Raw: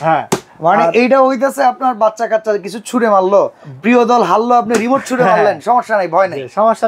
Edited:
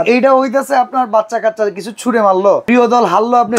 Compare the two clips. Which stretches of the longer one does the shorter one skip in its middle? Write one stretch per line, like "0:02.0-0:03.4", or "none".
0:03.5-0:03.8